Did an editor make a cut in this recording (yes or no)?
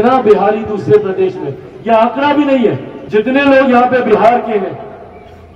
yes